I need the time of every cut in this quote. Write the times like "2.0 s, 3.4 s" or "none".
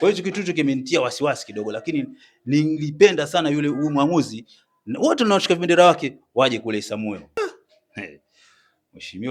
7.4 s